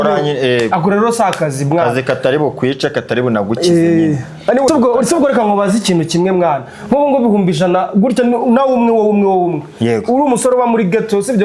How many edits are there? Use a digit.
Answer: 1